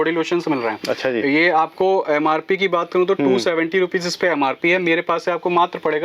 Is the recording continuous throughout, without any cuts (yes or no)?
yes